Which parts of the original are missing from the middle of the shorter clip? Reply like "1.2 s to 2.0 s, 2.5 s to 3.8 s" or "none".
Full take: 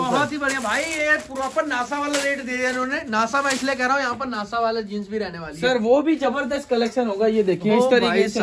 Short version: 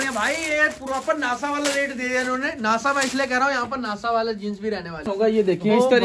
5.6 s to 7.1 s